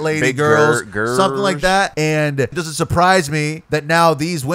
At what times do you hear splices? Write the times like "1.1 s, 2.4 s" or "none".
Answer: 1.9 s, 2.6 s, 3.6 s